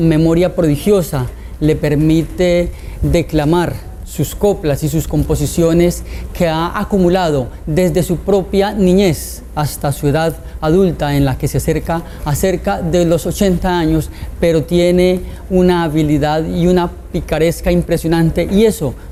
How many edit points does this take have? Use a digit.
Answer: 0